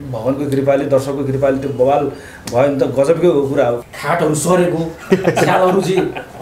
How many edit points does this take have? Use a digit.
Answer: 1